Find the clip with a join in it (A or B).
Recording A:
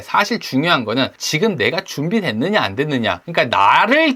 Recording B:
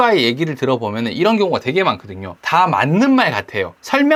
A